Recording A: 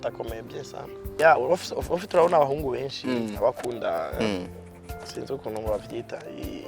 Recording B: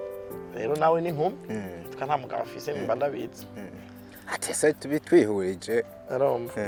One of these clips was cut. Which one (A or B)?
A